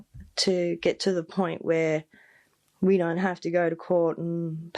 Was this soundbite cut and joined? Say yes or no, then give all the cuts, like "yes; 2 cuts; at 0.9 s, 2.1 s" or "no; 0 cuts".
no; 0 cuts